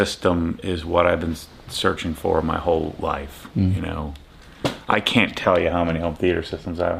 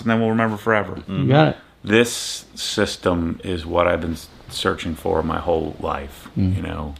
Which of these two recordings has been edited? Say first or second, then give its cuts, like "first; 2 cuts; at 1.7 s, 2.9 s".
second; 1 cut; at 1.6 s